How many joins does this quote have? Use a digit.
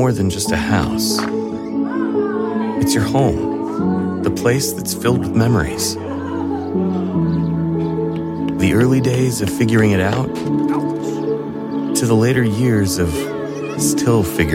0